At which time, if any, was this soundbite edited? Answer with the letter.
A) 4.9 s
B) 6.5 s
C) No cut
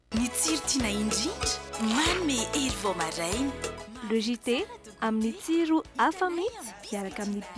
C